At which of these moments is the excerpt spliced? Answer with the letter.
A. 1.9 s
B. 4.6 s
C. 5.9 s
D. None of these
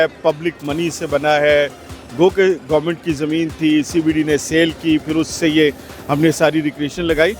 D